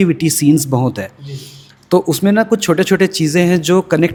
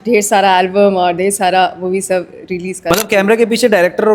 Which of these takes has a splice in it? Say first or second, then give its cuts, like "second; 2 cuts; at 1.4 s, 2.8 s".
second; 1 cut; at 2.9 s